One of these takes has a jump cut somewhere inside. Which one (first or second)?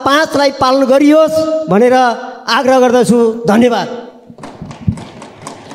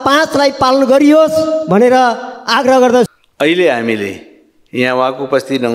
second